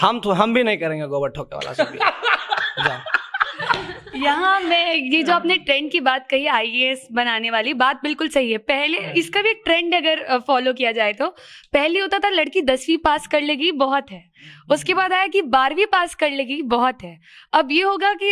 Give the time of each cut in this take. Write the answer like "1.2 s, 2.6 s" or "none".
none